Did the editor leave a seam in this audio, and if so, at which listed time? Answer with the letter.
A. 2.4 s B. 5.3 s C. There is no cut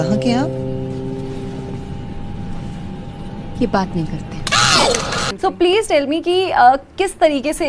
B